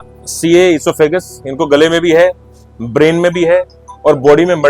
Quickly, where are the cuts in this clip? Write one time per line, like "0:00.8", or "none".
none